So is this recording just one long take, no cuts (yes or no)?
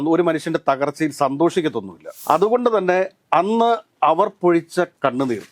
no